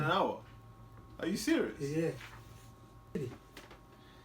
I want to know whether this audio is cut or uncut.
cut